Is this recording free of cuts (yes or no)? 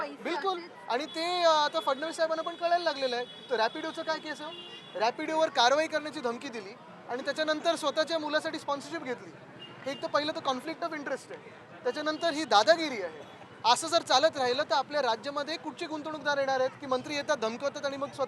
yes